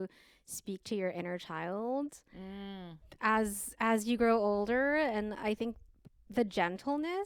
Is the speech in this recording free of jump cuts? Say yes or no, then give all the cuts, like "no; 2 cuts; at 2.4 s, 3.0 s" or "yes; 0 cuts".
yes; 0 cuts